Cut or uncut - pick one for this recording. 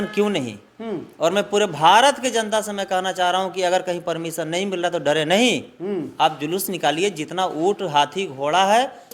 uncut